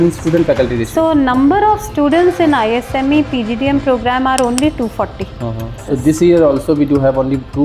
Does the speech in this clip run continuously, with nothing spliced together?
no; 1 cut; at 5.8 s

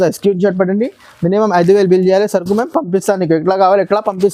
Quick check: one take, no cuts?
yes; 0 cuts

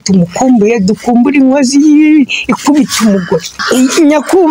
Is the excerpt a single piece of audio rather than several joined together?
no; 1 cut; at 3.5 s

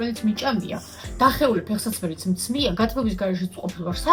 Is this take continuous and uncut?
yes; 0 cuts

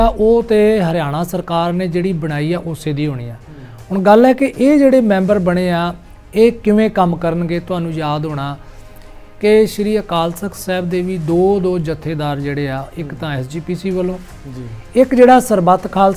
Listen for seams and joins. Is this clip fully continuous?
yes; 0 cuts

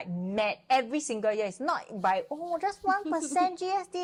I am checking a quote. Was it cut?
no; 0 cuts

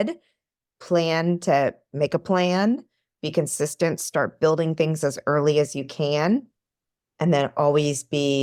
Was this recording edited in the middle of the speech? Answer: no; 0 cuts

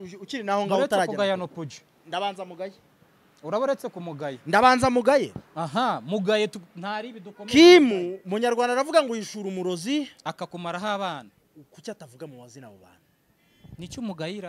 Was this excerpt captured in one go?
yes; 0 cuts

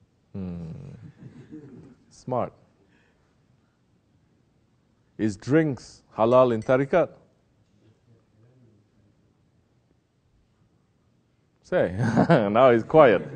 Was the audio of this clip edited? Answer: yes; 1 cut; at 5.6 s

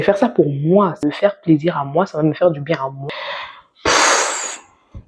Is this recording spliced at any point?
yes; 2 cuts; at 1.0 s, 3.0 s

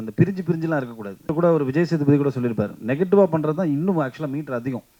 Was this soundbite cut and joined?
yes; 1 cut; at 1.3 s

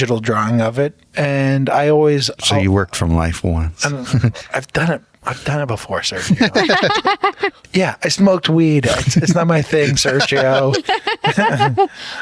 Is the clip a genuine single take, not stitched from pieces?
no; 2 cuts; at 1.0 s, 7.6 s

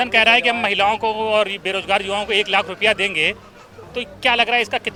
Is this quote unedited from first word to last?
yes; 0 cuts

